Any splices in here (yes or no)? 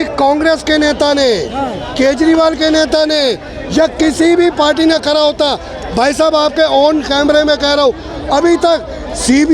no